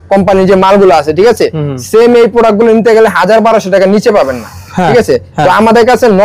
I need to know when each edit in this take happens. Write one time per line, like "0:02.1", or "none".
none